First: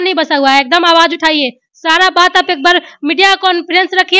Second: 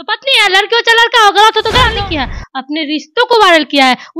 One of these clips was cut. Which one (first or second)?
second